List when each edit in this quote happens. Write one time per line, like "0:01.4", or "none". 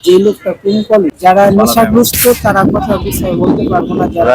0:01.0